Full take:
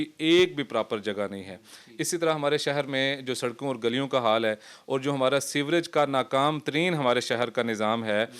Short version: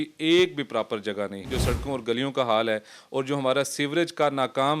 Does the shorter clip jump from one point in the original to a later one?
yes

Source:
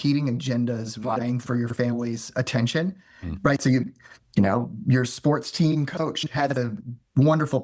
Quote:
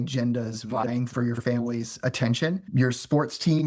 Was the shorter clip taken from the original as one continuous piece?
no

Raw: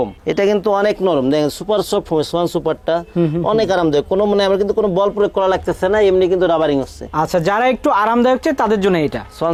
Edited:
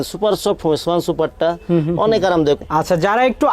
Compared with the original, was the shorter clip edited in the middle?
yes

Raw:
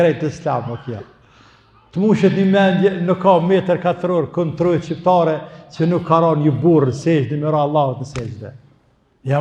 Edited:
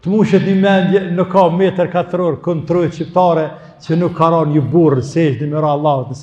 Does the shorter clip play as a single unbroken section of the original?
yes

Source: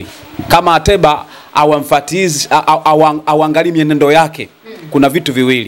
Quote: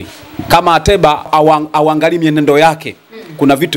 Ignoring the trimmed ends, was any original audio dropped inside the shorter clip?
yes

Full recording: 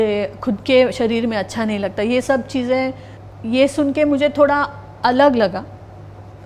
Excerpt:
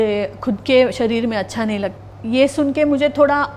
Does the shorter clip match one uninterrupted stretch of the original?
no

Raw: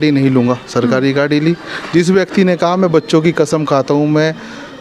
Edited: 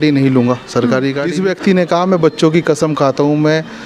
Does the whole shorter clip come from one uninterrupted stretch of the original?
no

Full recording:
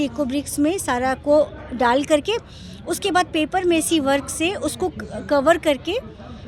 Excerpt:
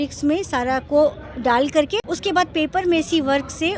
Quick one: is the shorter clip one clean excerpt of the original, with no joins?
no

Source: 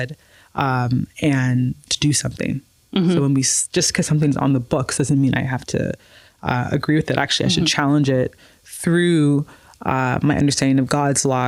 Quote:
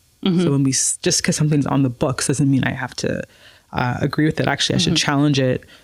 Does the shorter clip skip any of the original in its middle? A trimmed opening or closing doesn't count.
no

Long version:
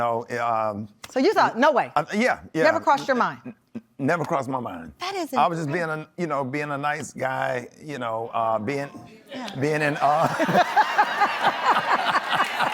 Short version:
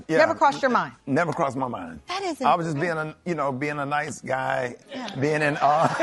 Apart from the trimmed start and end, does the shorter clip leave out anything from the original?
yes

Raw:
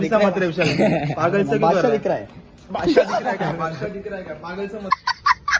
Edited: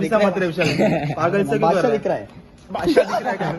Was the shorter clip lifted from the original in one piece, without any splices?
yes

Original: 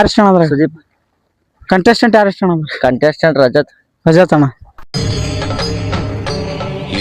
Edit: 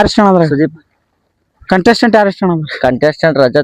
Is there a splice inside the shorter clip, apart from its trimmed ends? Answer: no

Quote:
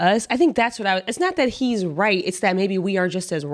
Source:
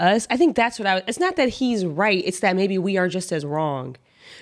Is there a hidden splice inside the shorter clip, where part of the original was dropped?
no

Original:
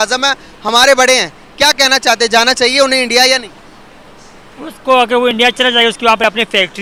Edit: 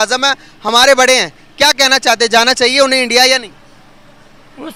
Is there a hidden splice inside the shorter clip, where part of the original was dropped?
no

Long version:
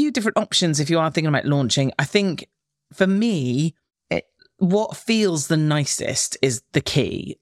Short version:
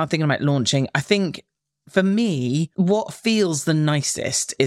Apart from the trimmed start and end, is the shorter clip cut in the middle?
yes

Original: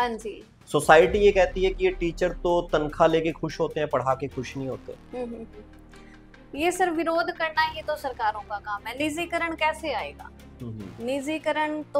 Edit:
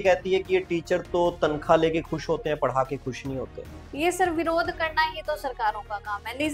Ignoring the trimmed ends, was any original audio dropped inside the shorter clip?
yes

